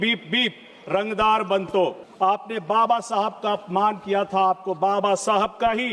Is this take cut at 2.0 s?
yes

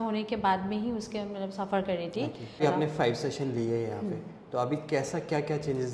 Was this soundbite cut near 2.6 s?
yes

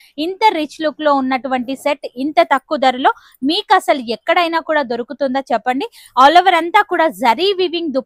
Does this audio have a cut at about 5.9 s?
no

